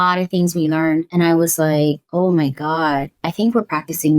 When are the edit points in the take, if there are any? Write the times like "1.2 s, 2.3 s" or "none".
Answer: 1.1 s, 2.0 s